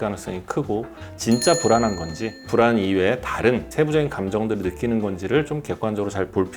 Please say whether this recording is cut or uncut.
cut